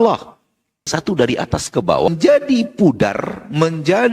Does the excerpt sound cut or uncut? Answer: cut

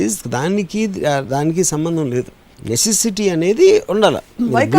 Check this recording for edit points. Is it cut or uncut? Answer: uncut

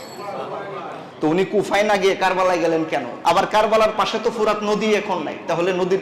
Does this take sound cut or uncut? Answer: cut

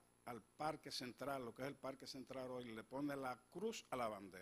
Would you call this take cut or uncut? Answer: cut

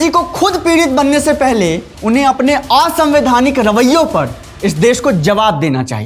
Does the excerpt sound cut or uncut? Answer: uncut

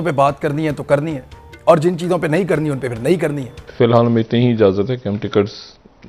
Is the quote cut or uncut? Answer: cut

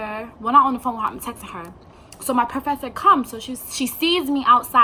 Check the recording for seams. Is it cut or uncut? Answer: uncut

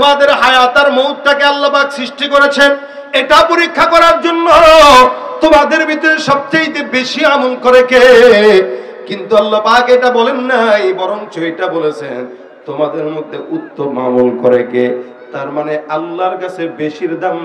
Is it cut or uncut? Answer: uncut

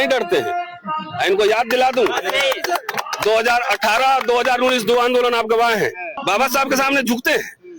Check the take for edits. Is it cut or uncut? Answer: cut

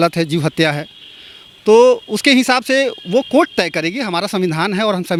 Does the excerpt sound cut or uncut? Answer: uncut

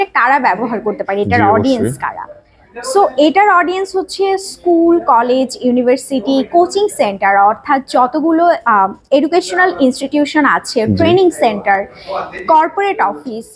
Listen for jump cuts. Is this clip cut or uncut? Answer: uncut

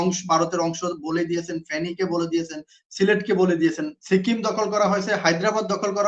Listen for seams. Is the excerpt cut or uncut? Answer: cut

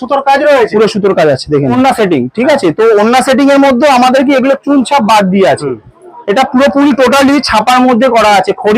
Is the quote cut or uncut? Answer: cut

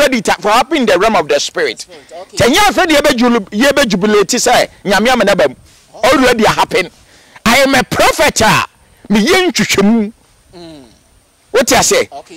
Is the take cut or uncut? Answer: uncut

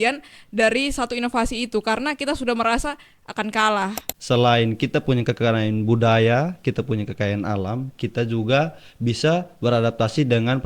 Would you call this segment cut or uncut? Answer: cut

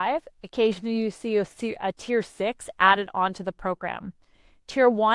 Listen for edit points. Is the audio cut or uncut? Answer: uncut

